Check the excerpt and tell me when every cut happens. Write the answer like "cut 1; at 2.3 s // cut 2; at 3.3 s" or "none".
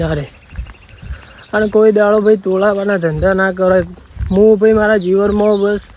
none

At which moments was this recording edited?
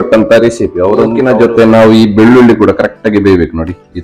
cut 1; at 1.2 s

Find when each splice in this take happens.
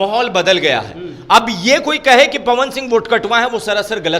none

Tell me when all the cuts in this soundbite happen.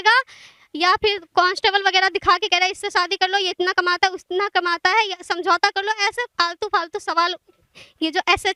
none

